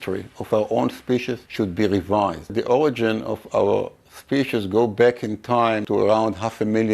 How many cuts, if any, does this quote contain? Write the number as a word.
three